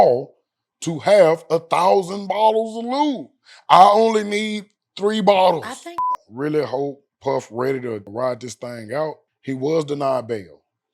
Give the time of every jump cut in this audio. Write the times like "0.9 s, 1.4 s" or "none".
6.1 s